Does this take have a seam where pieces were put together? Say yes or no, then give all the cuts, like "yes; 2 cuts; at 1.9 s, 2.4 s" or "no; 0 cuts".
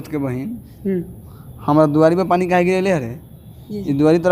no; 0 cuts